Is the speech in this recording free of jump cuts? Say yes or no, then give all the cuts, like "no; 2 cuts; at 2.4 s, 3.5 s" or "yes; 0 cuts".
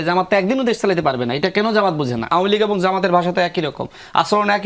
no; 1 cut; at 2.2 s